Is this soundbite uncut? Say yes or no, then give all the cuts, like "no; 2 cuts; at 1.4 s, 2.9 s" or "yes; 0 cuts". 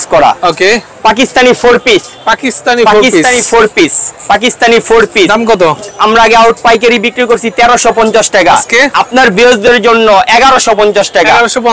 yes; 0 cuts